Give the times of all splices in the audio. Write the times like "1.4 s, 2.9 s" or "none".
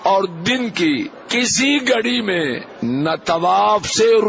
1.2 s, 2.7 s